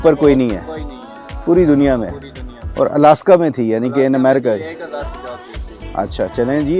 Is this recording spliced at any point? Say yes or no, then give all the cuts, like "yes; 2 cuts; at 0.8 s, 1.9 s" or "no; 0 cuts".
no; 0 cuts